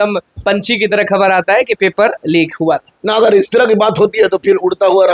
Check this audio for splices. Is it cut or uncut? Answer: uncut